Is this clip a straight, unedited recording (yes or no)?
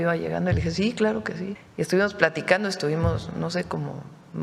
no